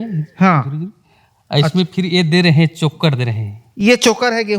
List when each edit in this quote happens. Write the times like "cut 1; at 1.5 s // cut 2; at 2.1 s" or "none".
none